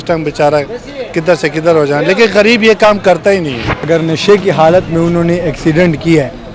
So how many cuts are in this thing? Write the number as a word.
one